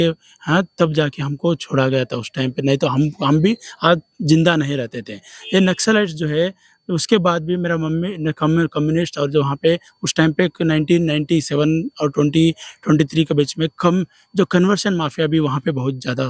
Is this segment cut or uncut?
uncut